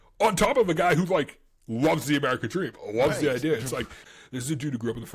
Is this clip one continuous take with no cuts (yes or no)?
no